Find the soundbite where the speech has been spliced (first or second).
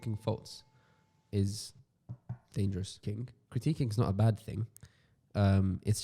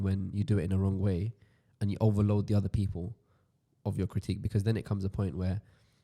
first